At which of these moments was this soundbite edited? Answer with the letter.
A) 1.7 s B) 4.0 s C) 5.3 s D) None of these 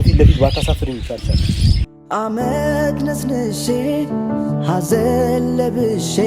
A